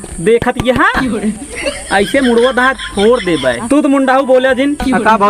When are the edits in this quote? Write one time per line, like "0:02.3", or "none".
0:03.6